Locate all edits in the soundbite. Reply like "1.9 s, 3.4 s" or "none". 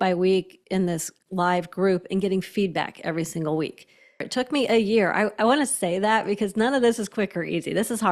4.2 s